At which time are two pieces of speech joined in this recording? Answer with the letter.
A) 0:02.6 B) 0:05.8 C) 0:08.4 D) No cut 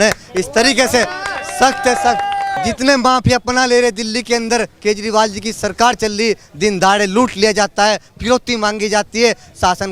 A